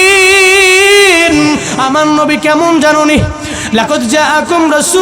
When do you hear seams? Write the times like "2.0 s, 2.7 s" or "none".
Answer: 1.7 s

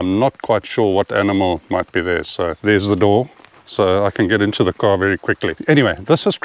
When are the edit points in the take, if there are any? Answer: 2.6 s, 5.5 s

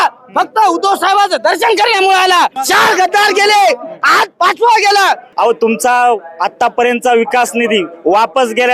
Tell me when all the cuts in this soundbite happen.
2.6 s, 5.3 s

